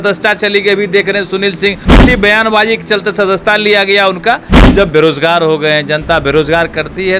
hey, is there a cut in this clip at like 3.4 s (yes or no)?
no